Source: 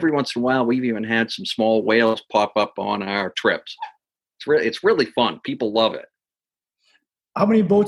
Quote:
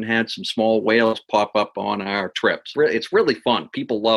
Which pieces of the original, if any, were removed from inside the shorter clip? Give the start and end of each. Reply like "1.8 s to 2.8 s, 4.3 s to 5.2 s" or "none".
3.6 s to 4.3 s